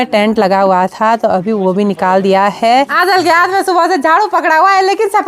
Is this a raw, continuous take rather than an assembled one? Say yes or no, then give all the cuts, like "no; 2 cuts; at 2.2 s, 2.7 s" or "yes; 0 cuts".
no; 1 cut; at 2.9 s